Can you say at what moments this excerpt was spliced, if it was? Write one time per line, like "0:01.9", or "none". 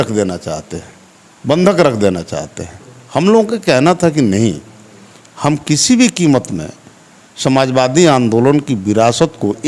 none